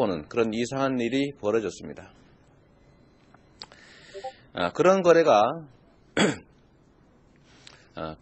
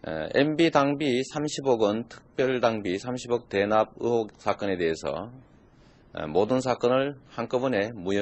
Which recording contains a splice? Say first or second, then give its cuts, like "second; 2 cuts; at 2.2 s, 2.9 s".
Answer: first; 1 cut; at 7.0 s